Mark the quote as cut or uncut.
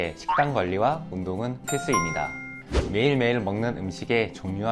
uncut